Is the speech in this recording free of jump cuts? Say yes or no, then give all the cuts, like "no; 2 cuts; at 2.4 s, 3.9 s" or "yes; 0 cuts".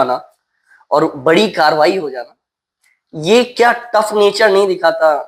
yes; 0 cuts